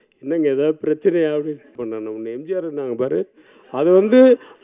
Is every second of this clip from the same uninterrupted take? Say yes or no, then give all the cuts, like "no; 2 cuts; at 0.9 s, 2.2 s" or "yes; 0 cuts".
no; 1 cut; at 1.8 s